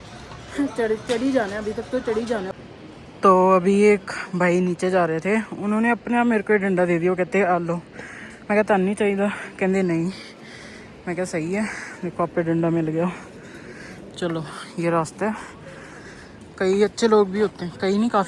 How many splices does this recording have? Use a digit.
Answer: 1